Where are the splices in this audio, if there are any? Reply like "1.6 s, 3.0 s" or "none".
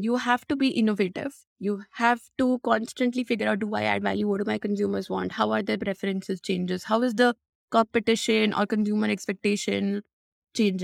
none